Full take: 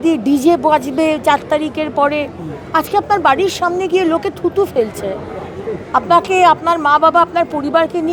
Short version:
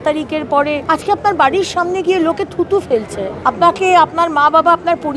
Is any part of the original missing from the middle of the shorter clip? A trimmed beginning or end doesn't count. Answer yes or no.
yes